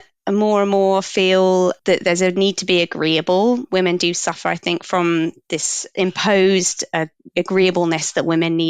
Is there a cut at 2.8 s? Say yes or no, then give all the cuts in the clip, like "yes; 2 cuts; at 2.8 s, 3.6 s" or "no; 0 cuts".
no; 1 cut; at 5.8 s